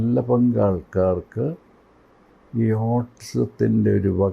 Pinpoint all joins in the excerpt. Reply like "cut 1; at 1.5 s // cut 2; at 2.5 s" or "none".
none